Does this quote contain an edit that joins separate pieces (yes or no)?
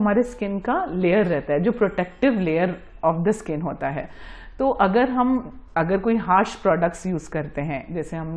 no